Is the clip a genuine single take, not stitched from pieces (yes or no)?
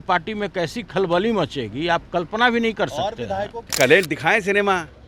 no